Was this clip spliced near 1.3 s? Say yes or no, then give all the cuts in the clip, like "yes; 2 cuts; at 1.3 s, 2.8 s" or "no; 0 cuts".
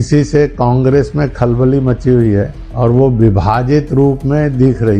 no; 1 cut; at 2.6 s